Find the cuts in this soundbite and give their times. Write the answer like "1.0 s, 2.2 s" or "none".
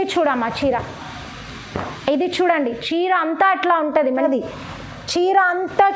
4.1 s